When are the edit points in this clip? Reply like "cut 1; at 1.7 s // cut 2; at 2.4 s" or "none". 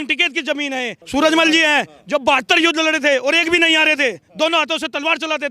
cut 1; at 1.0 s